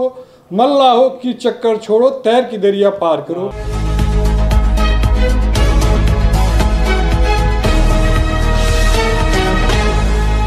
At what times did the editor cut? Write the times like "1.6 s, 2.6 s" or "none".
3.6 s